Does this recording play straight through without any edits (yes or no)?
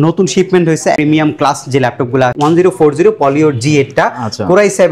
no